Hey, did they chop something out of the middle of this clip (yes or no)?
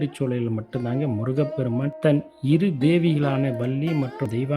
yes